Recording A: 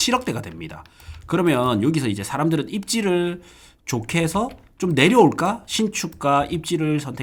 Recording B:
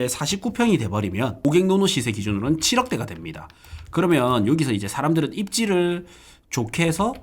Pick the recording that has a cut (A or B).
B